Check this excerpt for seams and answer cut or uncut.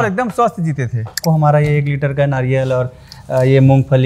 cut